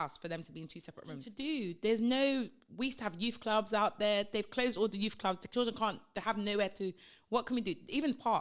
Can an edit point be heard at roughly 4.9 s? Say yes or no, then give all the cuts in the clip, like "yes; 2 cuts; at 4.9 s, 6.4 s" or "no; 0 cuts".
no; 1 cut; at 1.3 s